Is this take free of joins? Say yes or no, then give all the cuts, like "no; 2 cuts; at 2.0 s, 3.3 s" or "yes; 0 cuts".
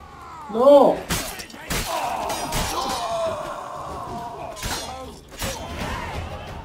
yes; 0 cuts